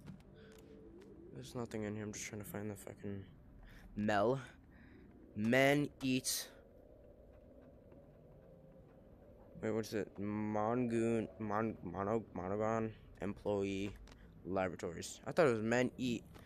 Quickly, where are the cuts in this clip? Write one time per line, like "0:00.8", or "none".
none